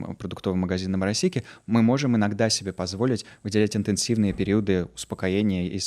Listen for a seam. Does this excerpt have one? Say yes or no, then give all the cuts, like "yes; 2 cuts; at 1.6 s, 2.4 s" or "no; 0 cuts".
no; 0 cuts